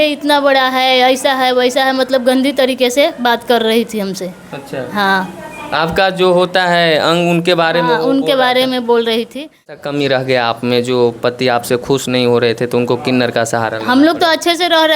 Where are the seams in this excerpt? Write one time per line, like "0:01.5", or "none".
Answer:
0:09.8